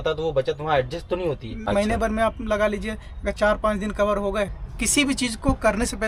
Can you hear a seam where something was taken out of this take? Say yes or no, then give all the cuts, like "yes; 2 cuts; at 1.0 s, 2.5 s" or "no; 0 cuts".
yes; 2 cuts; at 1.5 s, 4.6 s